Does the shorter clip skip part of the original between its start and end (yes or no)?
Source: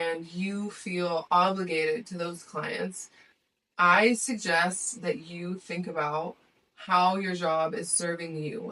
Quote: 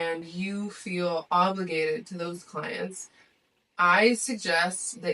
no